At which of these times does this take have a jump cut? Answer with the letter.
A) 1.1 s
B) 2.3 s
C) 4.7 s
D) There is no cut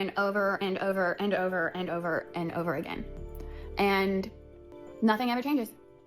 C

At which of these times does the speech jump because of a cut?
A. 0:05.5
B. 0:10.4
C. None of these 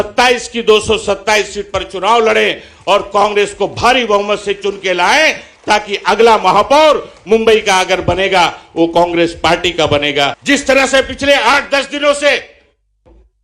B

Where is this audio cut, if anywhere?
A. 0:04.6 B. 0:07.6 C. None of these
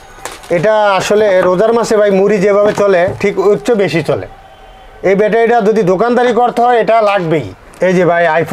B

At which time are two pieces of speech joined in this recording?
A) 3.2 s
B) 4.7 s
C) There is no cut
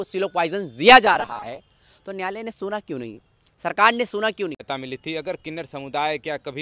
B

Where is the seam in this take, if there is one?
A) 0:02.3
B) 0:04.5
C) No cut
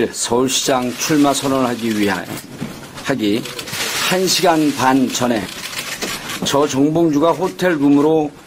A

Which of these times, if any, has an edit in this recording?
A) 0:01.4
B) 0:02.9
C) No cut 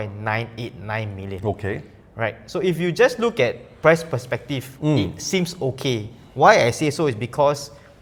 C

